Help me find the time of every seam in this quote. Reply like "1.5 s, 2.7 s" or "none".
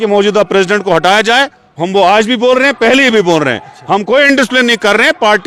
none